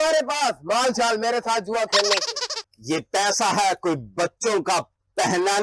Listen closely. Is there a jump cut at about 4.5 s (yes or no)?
no